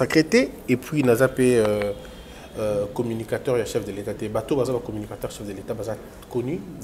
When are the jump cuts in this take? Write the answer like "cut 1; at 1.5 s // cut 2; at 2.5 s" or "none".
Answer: none

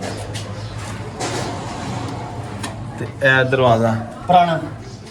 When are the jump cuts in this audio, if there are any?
none

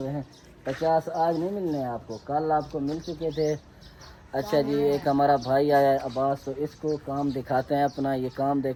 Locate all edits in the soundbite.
none

